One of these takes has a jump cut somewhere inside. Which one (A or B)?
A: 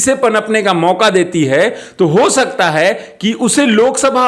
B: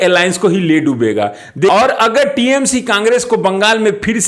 B